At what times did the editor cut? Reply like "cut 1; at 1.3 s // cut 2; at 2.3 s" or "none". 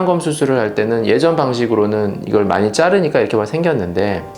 none